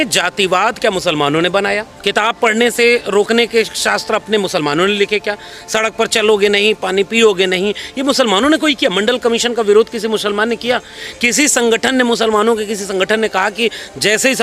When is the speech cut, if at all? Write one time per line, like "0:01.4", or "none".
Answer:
0:01.9